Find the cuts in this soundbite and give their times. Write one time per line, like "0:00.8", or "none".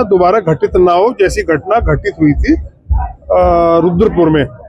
none